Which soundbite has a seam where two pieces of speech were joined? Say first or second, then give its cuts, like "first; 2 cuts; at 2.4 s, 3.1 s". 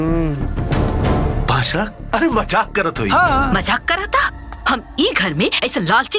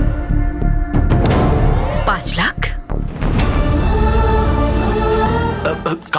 second; 2 cuts; at 1.3 s, 5.3 s